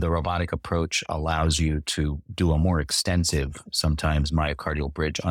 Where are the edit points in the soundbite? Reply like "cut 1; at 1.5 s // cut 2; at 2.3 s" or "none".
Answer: none